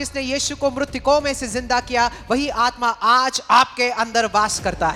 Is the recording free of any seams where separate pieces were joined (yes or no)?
yes